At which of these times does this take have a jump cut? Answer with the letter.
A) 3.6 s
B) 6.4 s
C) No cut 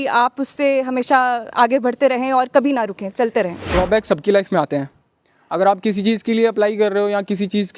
A